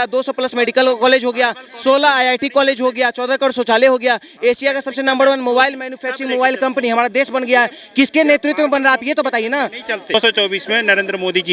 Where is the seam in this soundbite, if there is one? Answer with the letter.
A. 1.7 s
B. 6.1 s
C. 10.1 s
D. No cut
C